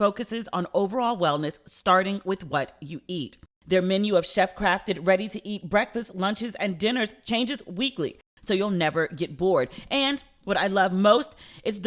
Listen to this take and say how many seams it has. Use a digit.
1